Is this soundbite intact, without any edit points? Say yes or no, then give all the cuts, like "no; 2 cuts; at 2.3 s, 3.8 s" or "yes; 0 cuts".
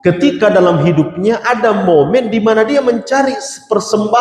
yes; 0 cuts